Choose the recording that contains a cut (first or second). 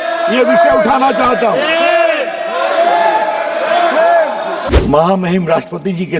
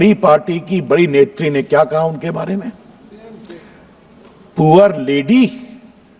first